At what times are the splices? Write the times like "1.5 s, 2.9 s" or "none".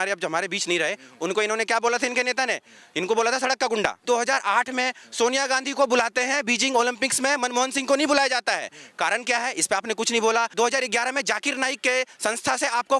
4.0 s, 10.5 s